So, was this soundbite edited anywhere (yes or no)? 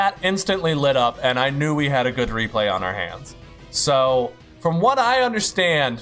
no